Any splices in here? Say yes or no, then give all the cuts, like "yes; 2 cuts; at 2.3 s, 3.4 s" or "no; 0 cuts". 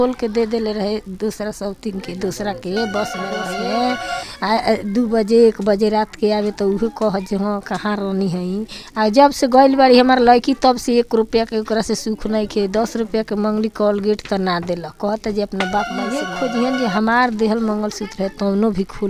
yes; 2 cuts; at 3.4 s, 16.3 s